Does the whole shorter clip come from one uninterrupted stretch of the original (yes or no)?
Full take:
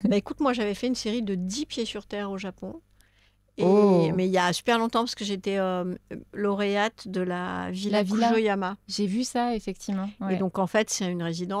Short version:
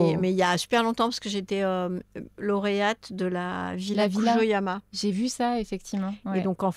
yes